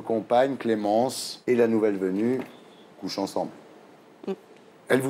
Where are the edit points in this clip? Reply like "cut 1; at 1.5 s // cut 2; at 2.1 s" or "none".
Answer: cut 1; at 1.3 s